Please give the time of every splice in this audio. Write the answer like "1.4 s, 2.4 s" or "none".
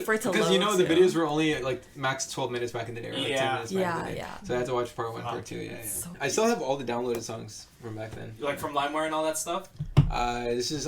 6.0 s

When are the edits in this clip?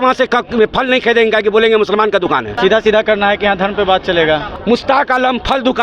2.5 s, 4.5 s

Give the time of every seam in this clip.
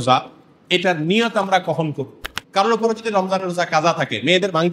2.2 s

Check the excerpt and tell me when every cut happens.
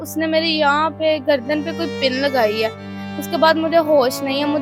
none

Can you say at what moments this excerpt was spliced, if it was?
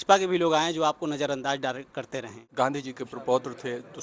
2.4 s

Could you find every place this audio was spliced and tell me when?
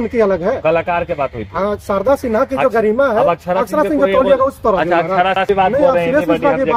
5.5 s

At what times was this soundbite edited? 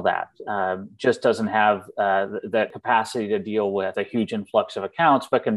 2.7 s, 3.9 s

